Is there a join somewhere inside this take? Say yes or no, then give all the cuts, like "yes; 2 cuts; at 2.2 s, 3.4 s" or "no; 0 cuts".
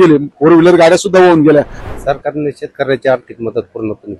yes; 1 cut; at 1.8 s